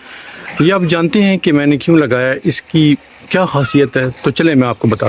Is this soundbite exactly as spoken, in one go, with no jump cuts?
yes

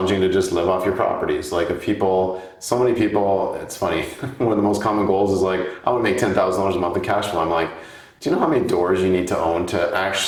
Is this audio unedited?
yes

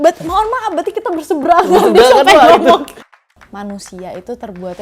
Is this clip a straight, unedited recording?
no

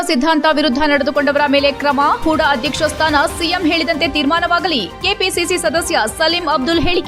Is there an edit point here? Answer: no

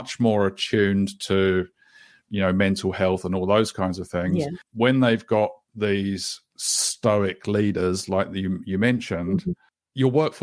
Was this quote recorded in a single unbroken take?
yes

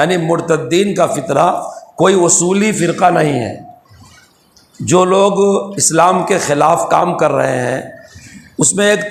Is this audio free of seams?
yes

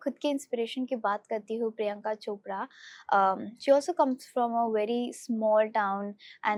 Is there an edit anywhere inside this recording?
no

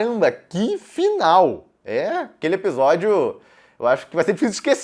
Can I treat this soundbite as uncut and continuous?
yes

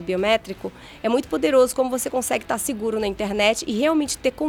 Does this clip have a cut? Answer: no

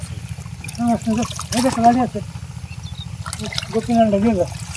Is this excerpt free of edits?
yes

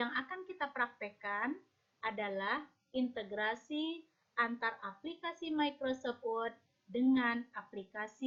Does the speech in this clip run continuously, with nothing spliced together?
yes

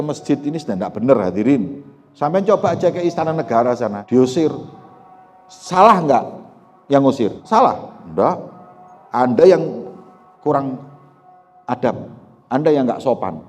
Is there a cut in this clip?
yes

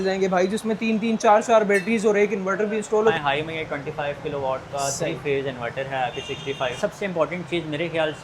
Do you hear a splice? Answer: yes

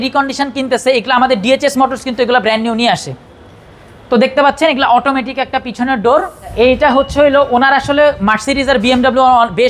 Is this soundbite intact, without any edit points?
no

